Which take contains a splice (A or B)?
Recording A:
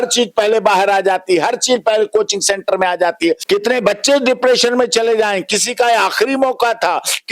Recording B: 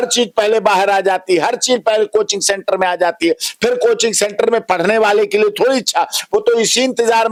A